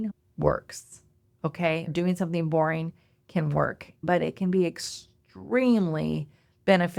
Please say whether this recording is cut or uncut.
cut